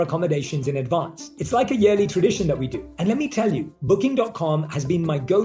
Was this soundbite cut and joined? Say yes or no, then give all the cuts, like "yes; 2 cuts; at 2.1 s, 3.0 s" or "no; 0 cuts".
no; 0 cuts